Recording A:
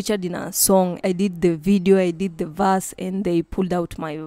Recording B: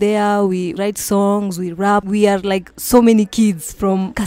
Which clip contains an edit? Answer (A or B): B